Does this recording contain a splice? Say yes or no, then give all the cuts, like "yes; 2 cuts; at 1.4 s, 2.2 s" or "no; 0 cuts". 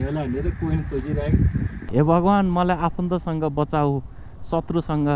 yes; 1 cut; at 1.8 s